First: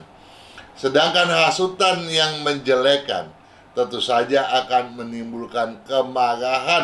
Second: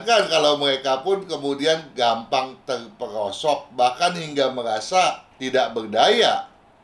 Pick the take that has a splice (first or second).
second